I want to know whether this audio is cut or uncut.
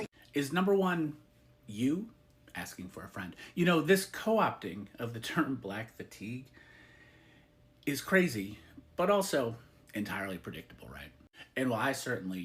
uncut